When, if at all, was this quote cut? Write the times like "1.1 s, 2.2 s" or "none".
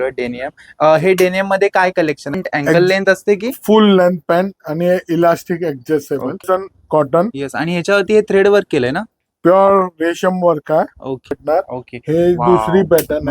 2.4 s, 6.5 s, 11.4 s